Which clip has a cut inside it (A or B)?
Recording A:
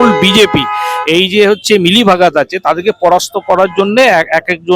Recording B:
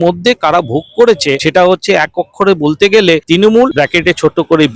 B